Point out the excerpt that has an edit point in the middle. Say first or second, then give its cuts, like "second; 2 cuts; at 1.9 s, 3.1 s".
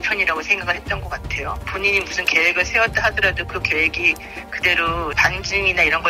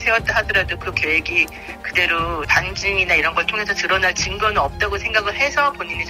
first; 1 cut; at 1.7 s